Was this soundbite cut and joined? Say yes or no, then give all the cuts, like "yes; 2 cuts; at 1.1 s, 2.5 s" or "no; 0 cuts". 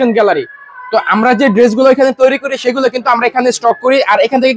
no; 0 cuts